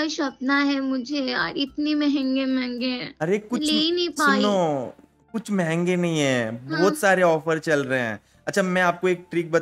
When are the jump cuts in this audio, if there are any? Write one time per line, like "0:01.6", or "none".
none